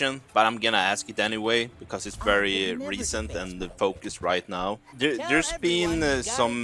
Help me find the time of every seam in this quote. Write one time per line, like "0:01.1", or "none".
0:04.9